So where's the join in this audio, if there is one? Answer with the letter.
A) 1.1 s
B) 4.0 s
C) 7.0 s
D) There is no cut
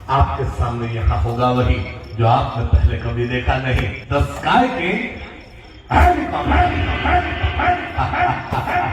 B